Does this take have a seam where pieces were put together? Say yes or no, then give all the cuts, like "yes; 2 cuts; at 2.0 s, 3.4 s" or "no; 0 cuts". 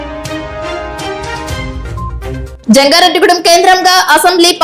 yes; 1 cut; at 2.5 s